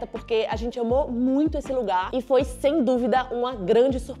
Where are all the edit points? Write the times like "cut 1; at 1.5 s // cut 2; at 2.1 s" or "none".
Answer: none